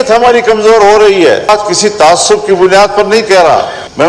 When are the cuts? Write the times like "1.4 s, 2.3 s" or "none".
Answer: 1.5 s